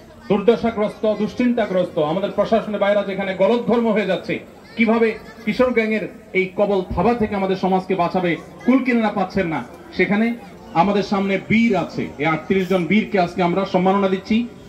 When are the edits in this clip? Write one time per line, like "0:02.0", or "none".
0:10.5